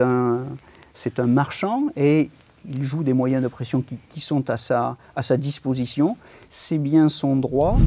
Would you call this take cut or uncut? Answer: cut